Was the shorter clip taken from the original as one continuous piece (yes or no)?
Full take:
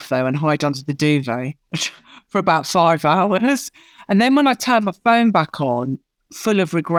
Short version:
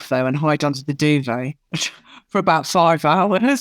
yes